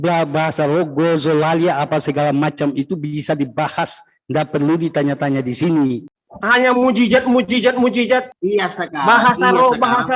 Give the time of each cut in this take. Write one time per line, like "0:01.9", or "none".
0:06.2
0:08.3